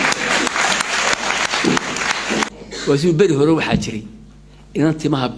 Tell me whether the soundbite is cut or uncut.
cut